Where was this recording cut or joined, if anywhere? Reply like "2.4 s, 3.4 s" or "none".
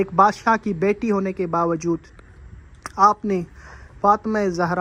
none